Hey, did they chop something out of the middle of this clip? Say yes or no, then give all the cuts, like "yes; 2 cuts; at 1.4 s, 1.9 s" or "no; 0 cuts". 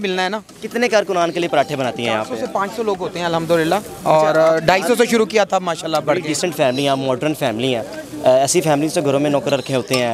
no; 0 cuts